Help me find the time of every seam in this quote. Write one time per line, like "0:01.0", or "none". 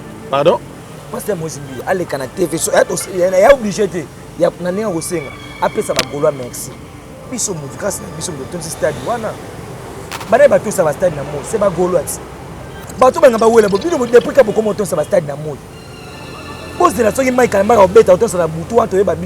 0:07.2